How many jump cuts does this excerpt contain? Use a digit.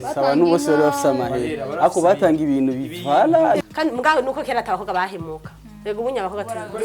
1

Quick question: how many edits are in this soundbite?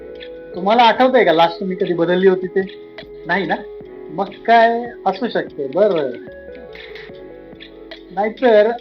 0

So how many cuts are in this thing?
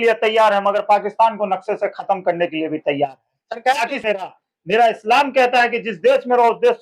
1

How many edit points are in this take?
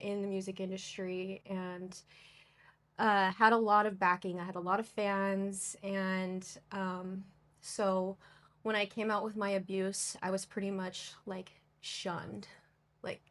0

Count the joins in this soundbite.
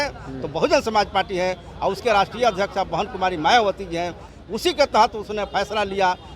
1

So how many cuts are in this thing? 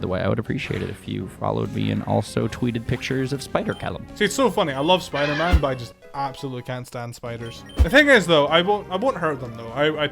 2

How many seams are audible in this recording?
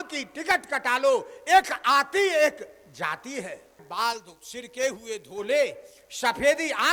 1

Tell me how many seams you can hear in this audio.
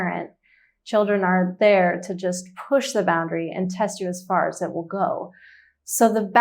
0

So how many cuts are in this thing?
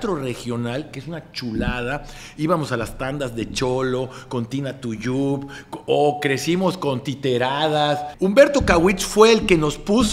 1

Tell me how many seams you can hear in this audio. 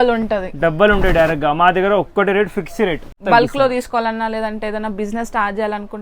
1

